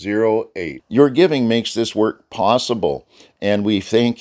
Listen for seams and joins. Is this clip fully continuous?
yes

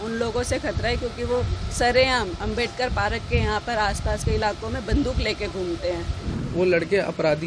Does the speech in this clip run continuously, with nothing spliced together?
no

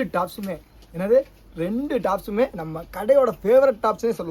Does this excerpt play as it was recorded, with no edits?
yes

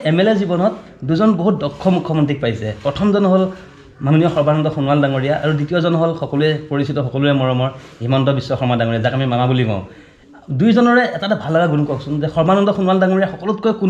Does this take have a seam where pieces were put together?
no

